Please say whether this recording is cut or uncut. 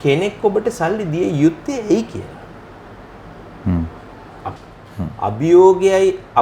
cut